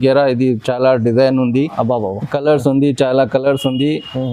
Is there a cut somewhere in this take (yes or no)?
no